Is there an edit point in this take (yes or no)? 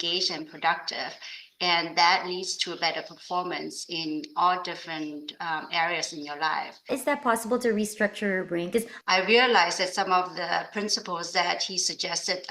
yes